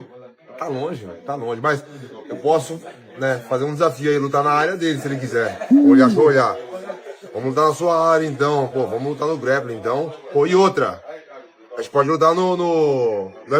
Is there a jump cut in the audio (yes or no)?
no